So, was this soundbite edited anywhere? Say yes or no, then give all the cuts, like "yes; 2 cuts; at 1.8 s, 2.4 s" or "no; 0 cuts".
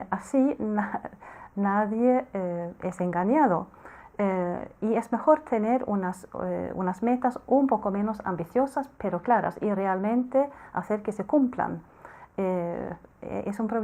no; 0 cuts